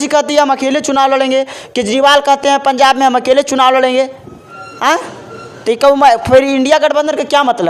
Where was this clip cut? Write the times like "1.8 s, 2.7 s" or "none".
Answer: none